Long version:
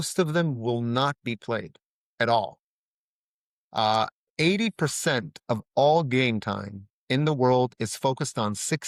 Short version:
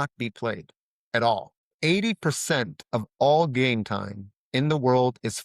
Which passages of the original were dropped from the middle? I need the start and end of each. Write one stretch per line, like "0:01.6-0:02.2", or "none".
0:02.7-0:04.2